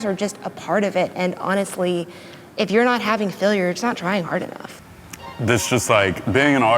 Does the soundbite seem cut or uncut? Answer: cut